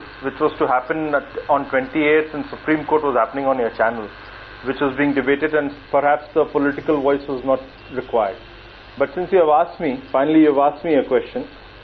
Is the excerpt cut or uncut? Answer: cut